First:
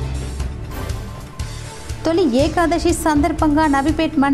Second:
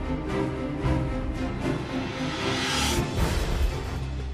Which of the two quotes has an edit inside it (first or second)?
second